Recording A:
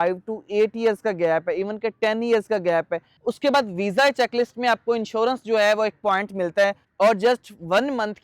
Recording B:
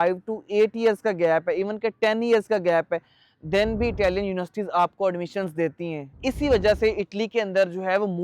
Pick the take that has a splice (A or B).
A